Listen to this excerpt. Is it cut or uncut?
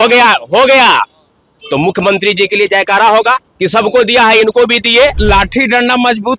cut